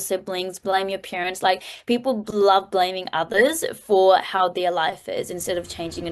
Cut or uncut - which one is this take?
uncut